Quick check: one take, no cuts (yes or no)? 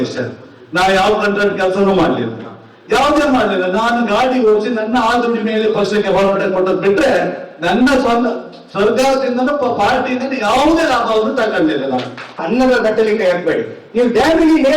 no